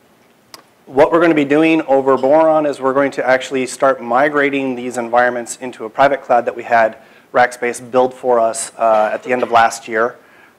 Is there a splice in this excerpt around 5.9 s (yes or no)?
no